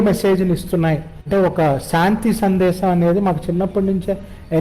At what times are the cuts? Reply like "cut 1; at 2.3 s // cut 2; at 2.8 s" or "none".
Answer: cut 1; at 1.2 s